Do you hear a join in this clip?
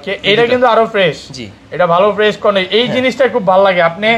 no; 0 cuts

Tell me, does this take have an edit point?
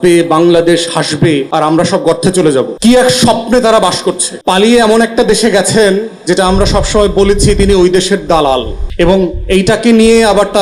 yes; 4 cuts; at 1.5 s, 2.7 s, 4.3 s, 8.8 s

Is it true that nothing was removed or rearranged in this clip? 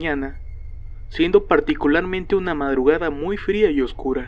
no; 1 cut; at 3.1 s

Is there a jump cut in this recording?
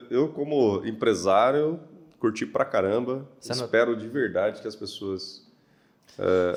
no; 0 cuts

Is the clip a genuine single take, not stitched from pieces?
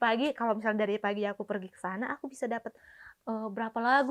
yes; 0 cuts

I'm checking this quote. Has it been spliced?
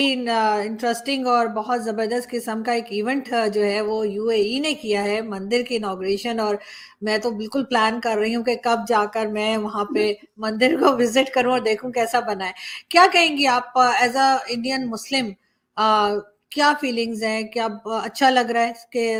no; 0 cuts

